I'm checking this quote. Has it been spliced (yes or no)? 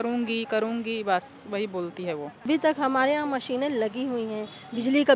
yes